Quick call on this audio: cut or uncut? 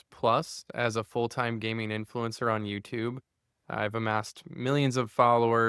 uncut